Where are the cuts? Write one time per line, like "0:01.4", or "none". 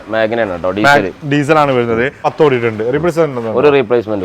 0:02.3